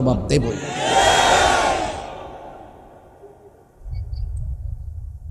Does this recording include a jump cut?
no; 0 cuts

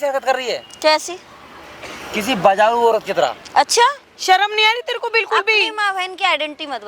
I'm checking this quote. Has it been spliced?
no; 0 cuts

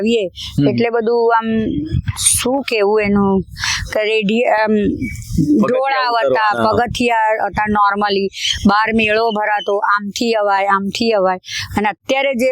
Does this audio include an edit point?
no; 0 cuts

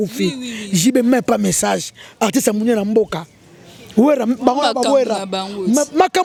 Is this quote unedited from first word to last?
yes; 0 cuts

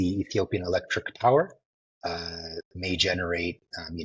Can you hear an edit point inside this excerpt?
no; 0 cuts

